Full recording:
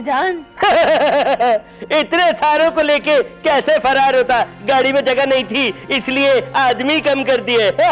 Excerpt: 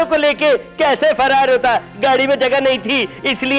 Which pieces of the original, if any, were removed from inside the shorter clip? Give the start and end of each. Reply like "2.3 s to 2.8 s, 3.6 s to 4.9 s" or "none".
none